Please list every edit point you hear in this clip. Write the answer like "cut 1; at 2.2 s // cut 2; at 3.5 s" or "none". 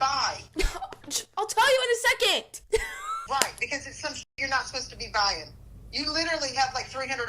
cut 1; at 3.2 s